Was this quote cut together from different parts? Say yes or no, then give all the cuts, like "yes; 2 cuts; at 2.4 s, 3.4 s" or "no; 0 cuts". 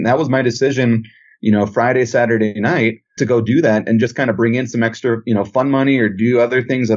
yes; 1 cut; at 2.6 s